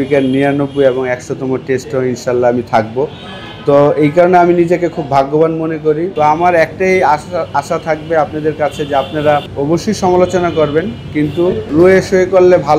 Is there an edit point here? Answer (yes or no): yes